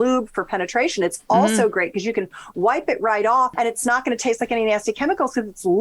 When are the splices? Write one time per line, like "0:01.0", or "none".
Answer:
0:03.5